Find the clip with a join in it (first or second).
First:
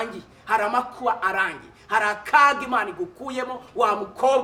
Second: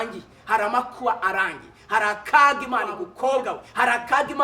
second